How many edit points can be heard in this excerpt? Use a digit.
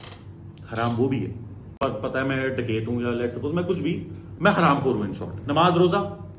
2